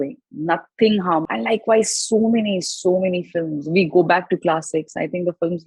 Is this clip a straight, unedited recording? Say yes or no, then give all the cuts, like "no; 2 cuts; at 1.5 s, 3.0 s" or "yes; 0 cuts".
no; 1 cut; at 1.3 s